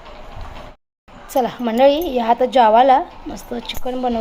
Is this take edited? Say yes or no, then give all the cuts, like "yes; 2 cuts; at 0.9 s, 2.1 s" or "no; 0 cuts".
no; 0 cuts